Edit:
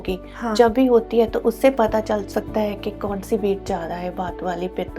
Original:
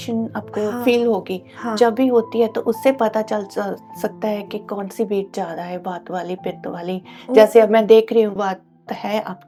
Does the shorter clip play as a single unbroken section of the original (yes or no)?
no